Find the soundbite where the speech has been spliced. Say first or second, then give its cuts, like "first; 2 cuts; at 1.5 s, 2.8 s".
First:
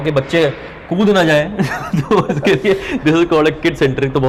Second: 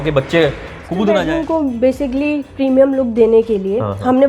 second; 1 cut; at 1.2 s